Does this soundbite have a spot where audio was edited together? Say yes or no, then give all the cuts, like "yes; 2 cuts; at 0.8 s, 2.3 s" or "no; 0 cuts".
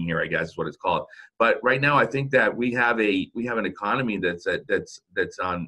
no; 0 cuts